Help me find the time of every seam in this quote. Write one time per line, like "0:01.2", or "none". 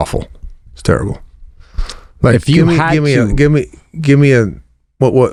none